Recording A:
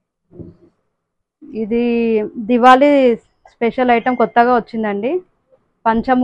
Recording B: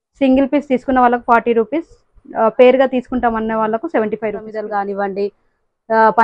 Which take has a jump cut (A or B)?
B